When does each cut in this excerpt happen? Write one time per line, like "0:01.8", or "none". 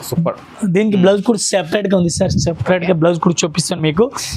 none